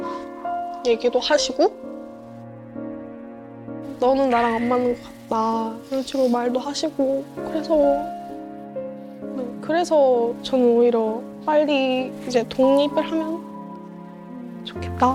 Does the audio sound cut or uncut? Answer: uncut